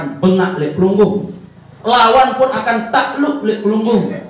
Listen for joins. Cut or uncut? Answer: uncut